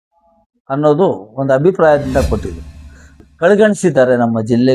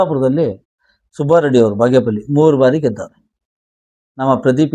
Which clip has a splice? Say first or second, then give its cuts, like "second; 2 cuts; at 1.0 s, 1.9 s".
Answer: first; 1 cut; at 3.2 s